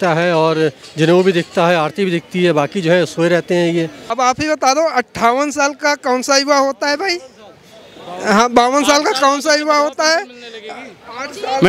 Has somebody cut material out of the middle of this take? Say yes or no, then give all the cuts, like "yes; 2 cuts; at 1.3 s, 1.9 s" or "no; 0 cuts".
yes; 1 cut; at 4.0 s